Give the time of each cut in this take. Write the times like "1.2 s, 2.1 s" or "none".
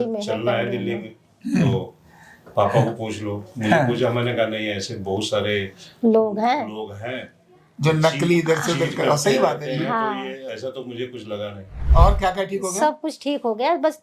11.7 s